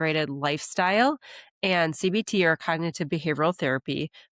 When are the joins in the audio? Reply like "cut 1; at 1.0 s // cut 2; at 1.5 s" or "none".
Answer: none

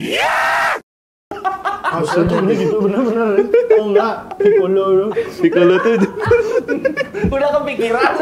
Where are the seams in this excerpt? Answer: none

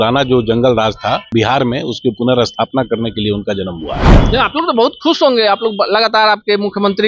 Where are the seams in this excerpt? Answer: cut 1; at 1.2 s

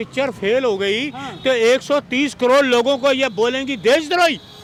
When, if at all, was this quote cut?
none

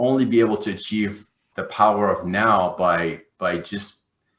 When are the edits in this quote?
cut 1; at 1.5 s

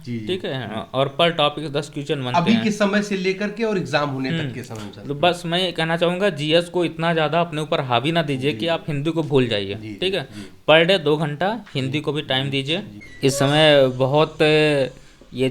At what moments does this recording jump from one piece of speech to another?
cut 1; at 12.9 s

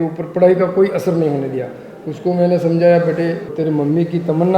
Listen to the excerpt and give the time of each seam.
cut 1; at 3.5 s

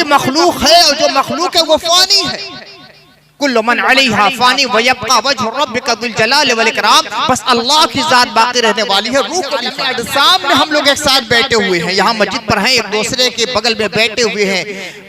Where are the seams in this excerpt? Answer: cut 1; at 9.8 s

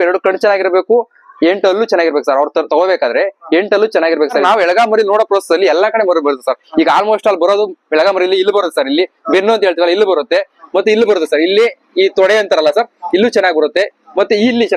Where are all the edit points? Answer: cut 1; at 4.4 s

